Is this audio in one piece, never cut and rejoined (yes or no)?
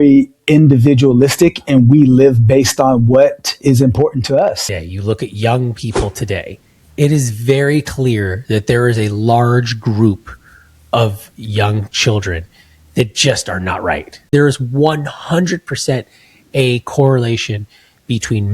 no